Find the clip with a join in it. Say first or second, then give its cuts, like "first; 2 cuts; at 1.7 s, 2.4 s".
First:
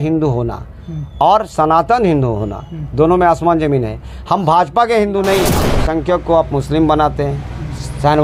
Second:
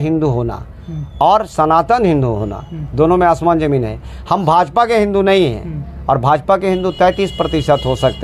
first; 1 cut; at 5.7 s